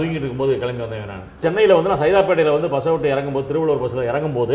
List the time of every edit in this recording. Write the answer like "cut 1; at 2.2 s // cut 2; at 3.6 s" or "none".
cut 1; at 1.4 s